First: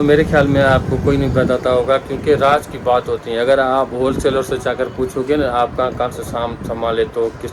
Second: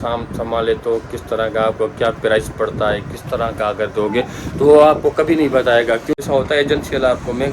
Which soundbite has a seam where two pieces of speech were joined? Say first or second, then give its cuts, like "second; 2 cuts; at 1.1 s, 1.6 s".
second; 1 cut; at 6.2 s